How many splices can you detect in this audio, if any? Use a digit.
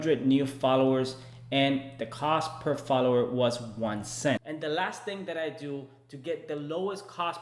1